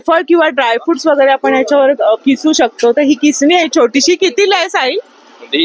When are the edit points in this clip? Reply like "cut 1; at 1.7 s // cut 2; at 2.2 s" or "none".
none